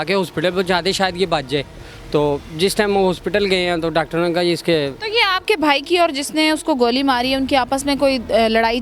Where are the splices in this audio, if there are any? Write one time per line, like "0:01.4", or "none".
none

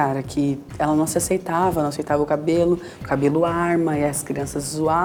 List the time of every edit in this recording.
none

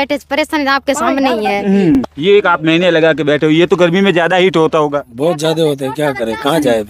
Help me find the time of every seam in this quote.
0:02.0

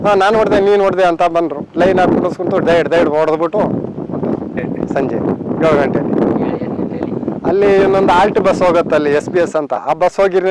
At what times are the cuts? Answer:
none

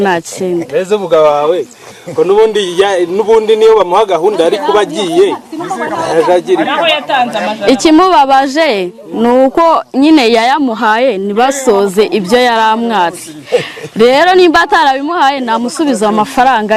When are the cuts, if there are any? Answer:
none

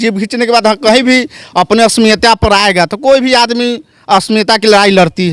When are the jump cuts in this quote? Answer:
none

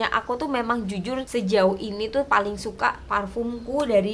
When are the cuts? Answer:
0:01.3

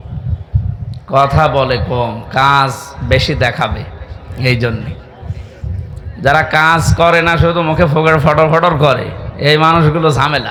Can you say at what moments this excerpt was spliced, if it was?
none

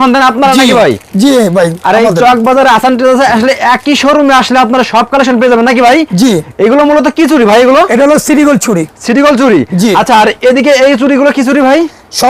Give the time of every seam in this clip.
none

